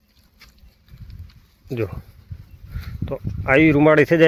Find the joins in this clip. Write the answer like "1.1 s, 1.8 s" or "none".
none

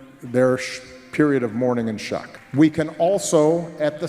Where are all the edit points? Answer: 2.4 s

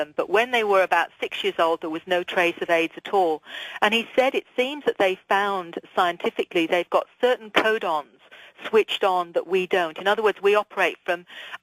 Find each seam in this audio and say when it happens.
6.2 s

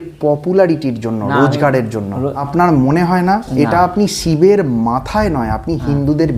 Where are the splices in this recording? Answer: 2.4 s

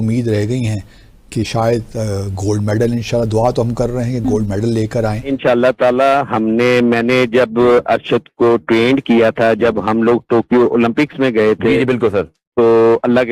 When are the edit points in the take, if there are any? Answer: 5.2 s

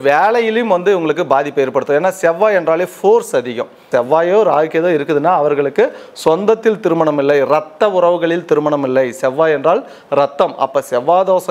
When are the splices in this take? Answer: 3.9 s

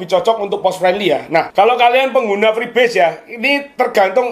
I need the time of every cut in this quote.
1.5 s

